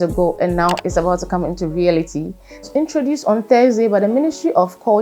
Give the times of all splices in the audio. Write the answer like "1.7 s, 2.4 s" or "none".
2.7 s